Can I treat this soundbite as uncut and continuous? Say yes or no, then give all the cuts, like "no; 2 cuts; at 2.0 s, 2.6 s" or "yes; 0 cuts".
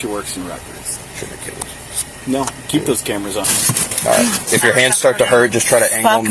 no; 2 cuts; at 1.0 s, 3.5 s